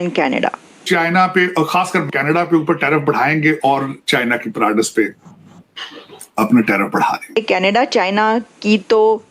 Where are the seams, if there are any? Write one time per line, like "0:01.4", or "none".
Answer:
0:00.8
0:02.1
0:07.4